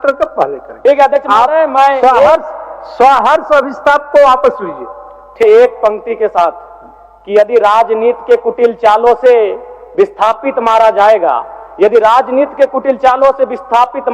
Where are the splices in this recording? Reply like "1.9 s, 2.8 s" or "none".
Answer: 5.4 s